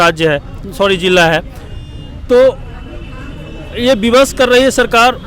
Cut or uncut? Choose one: uncut